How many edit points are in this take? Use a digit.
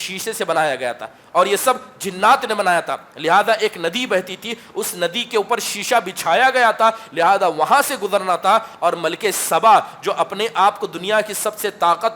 0